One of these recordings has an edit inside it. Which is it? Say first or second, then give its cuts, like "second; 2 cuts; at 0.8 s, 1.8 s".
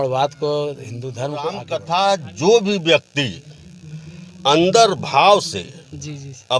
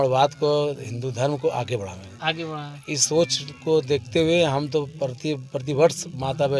first; 1 cut; at 1.7 s